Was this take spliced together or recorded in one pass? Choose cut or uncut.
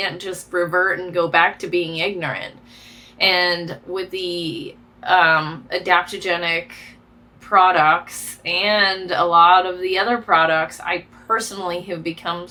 uncut